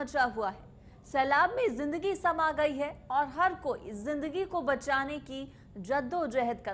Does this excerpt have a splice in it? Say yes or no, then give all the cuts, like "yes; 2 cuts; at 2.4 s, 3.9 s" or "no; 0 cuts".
no; 0 cuts